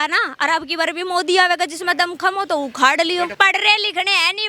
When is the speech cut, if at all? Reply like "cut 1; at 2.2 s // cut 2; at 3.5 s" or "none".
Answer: cut 1; at 3.3 s

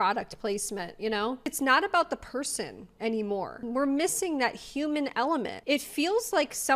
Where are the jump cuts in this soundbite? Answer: cut 1; at 1.5 s // cut 2; at 5.5 s

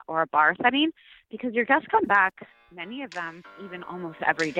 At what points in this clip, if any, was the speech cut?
cut 1; at 3.5 s

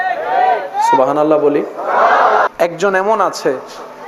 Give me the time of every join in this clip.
cut 1; at 2.5 s

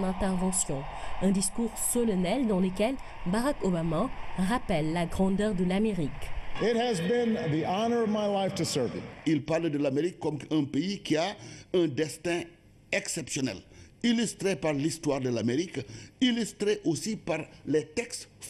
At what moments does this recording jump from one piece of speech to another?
cut 1; at 8.3 s

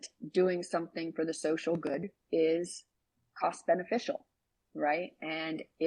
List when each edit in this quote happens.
none

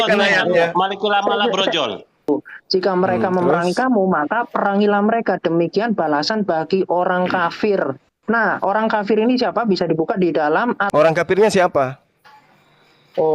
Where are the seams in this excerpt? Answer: cut 1; at 2.3 s // cut 2; at 10.8 s

